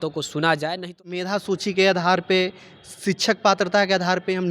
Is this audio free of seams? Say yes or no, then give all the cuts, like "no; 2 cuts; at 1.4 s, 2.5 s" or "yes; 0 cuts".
no; 1 cut; at 1.2 s